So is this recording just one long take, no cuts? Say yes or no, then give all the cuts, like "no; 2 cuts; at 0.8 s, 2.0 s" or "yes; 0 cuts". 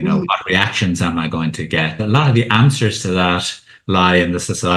no; 1 cut; at 2.0 s